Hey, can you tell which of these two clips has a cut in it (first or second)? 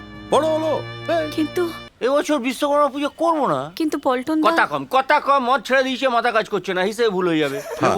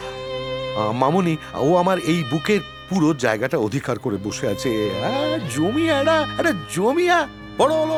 first